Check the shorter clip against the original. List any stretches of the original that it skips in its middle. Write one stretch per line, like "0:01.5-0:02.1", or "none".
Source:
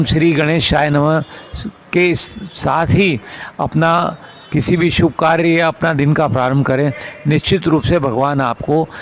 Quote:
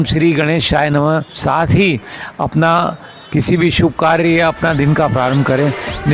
0:01.3-0:02.5